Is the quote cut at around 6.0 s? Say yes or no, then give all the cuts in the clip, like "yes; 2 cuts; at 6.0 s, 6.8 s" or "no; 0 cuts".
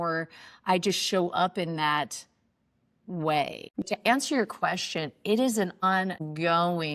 yes; 2 cuts; at 3.9 s, 6.0 s